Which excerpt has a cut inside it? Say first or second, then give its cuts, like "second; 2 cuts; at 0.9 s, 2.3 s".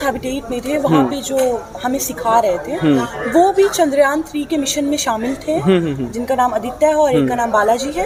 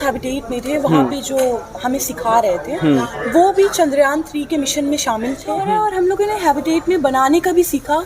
second; 1 cut; at 5.6 s